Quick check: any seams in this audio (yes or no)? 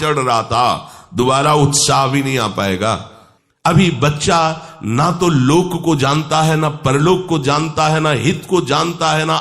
yes